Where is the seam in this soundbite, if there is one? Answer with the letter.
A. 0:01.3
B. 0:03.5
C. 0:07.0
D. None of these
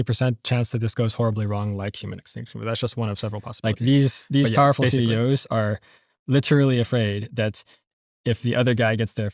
B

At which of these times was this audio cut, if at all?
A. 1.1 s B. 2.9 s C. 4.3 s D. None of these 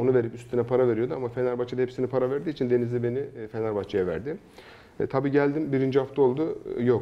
D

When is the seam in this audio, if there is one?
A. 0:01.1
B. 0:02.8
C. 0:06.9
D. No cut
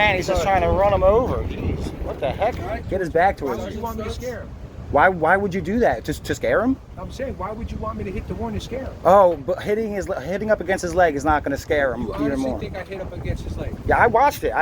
B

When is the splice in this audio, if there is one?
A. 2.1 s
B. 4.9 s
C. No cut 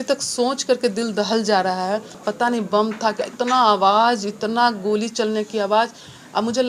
A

